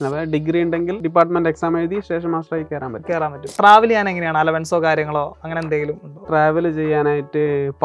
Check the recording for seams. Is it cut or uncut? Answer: cut